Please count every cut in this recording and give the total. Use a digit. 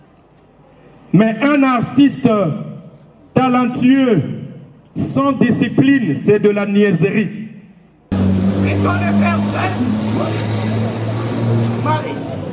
1